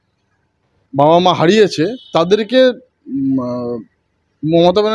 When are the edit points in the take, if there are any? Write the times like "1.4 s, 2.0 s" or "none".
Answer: none

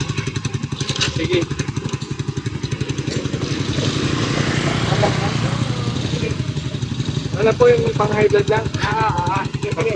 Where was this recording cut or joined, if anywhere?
none

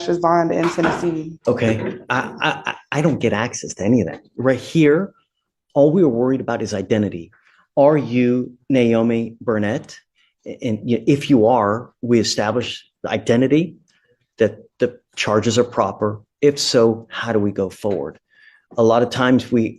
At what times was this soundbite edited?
1.3 s

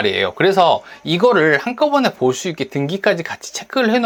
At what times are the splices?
none

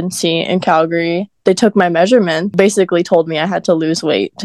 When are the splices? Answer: 1.3 s, 2.5 s

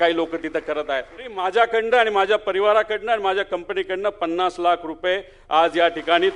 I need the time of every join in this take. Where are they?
1.3 s

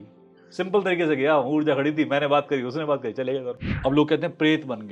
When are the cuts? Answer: 3.6 s

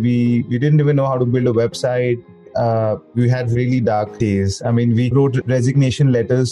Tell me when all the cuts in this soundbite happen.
2.5 s, 4.1 s, 5.1 s

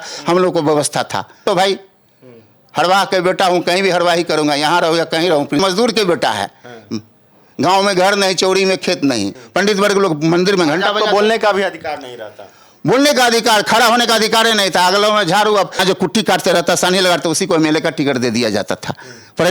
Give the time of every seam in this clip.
1.4 s, 5.6 s, 9.4 s, 15.8 s

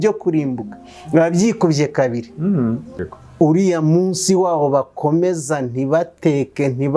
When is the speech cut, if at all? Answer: 3.1 s

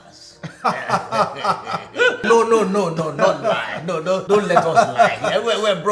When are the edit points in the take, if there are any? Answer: 2.2 s, 4.2 s

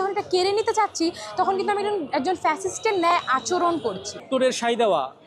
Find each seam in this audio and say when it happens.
4.3 s

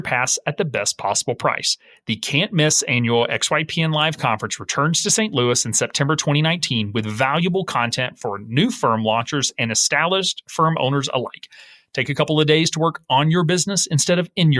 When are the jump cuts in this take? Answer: 10.4 s

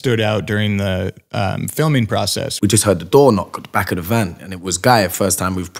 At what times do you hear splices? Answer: 2.4 s

